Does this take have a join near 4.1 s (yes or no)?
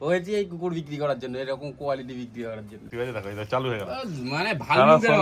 no